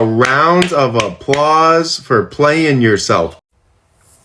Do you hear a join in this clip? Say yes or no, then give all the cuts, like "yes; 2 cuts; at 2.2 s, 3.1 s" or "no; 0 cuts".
yes; 1 cut; at 3.4 s